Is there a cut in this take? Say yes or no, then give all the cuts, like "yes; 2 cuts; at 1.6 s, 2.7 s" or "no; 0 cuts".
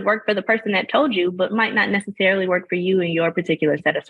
no; 0 cuts